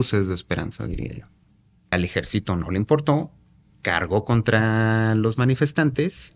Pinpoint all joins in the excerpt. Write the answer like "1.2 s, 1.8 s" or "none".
1.9 s